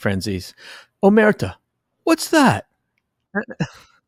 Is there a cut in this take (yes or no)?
no